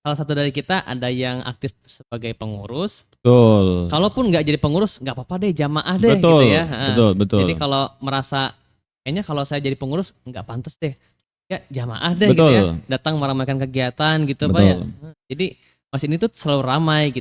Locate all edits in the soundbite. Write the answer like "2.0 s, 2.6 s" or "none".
none